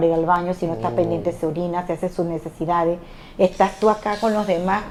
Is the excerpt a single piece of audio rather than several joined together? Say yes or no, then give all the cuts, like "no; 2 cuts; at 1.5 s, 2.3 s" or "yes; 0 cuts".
yes; 0 cuts